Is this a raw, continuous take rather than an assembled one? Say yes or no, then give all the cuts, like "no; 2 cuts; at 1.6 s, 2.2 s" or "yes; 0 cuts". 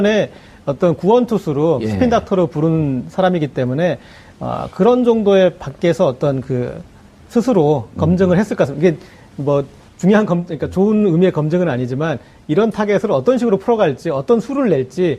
no; 1 cut; at 12.7 s